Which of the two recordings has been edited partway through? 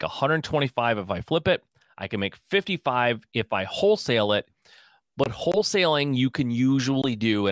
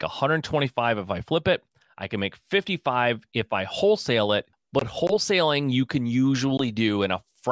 second; 1 cut; at 4.6 s

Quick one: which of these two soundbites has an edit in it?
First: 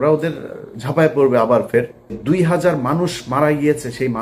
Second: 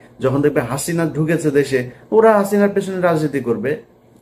first; 1 cut; at 2.2 s

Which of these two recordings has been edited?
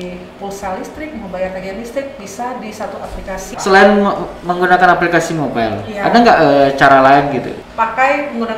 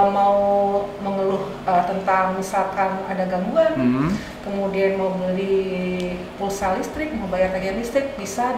first; 2 cuts; at 3.5 s, 7.6 s

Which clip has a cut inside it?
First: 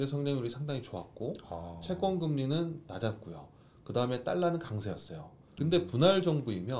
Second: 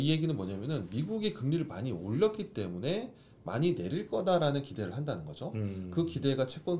first; 1 cut; at 5.4 s

